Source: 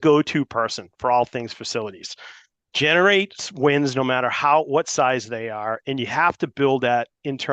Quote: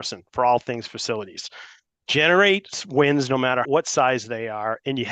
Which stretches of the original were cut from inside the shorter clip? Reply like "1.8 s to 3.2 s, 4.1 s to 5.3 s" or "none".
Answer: 4.3 s to 4.7 s